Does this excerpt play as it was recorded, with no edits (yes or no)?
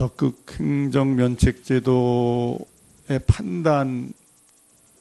no